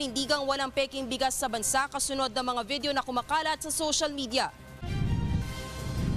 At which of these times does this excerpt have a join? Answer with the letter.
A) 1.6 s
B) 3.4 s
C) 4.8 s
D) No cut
C